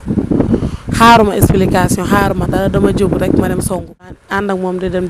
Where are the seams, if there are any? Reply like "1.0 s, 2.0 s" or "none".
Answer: 4.1 s